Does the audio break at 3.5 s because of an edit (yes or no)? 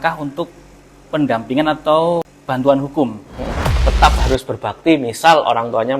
yes